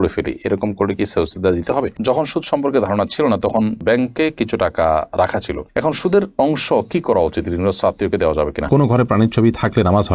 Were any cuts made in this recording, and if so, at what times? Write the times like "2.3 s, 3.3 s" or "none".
1.9 s, 8.7 s